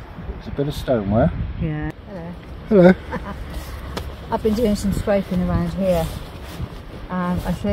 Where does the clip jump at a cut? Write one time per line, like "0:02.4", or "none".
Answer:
0:01.8